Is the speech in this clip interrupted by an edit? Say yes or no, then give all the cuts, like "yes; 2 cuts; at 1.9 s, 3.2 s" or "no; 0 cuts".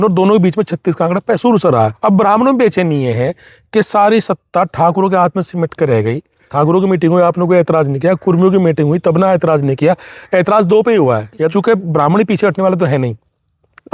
yes; 3 cuts; at 1.9 s, 6.4 s, 11.5 s